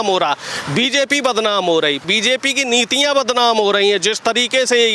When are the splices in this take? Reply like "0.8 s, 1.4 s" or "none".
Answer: none